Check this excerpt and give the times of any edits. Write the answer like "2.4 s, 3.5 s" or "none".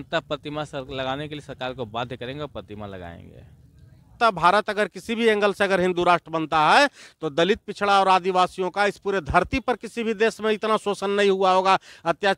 4.2 s